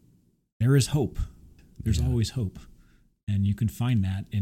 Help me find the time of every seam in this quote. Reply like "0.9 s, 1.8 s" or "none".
1.6 s

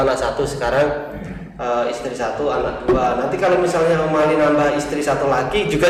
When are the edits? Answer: none

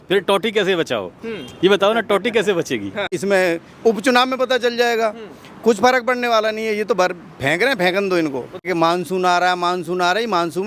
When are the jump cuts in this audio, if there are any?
3.1 s, 8.6 s

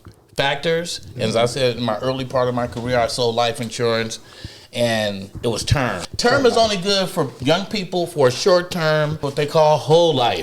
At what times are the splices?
6.0 s, 9.2 s

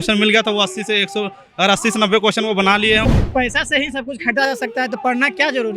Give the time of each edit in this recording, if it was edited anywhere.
3.2 s

